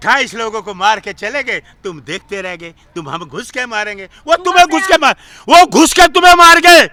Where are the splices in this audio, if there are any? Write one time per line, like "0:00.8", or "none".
none